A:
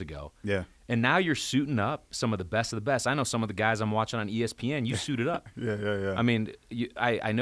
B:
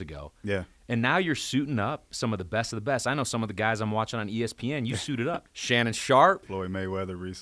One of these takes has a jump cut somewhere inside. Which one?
B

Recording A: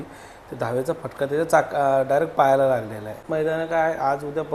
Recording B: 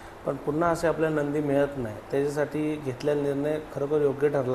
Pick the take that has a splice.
A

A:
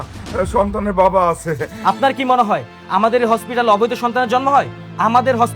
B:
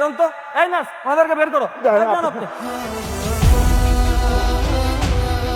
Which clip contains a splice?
A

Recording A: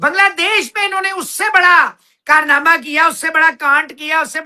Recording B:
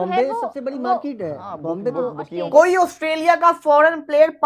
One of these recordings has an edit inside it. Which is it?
B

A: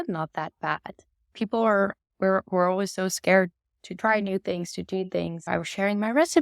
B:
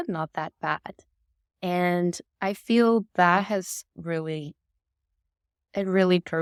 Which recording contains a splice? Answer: A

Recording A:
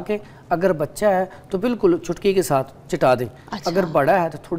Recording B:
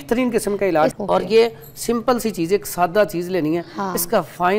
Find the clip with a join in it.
B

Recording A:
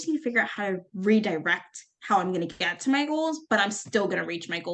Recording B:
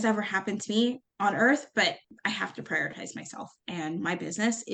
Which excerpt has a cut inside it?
B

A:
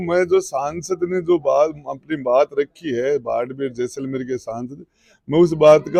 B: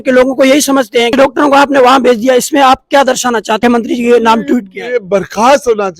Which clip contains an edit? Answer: B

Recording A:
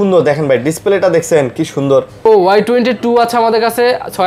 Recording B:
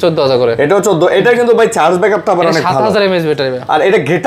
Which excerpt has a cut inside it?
A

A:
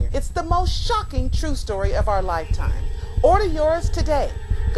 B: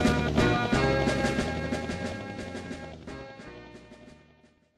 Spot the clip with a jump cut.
A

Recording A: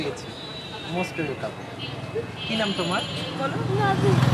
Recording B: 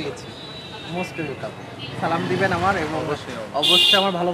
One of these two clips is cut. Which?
B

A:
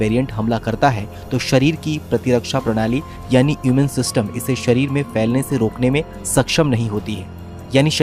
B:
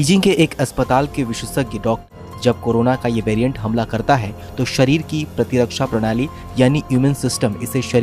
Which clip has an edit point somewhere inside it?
B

